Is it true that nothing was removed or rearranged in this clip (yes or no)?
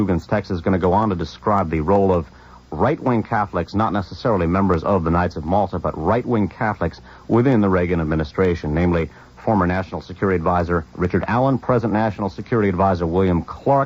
no